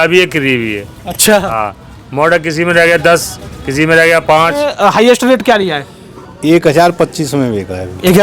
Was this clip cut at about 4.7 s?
yes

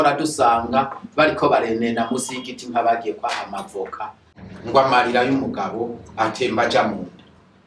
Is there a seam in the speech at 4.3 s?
yes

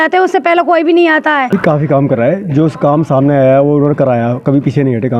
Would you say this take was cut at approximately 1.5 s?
yes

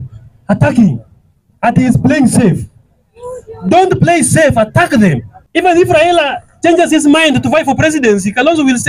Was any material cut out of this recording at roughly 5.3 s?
yes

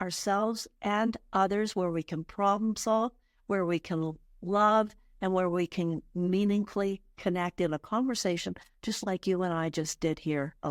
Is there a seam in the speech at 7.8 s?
no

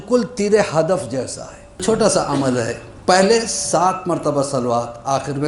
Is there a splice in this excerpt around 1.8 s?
yes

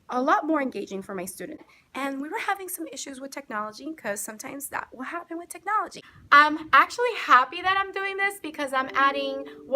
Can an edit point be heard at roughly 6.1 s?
yes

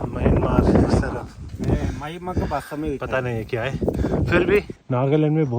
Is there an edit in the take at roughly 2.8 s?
no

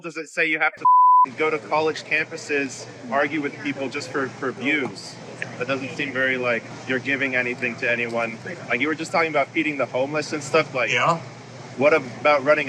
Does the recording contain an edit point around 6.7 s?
yes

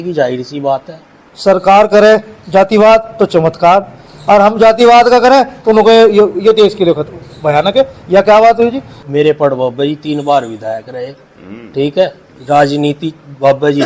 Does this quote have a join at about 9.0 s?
yes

